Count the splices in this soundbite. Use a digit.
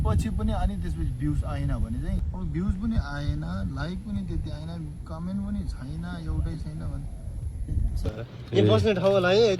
2